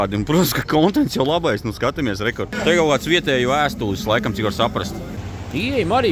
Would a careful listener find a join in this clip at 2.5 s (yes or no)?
yes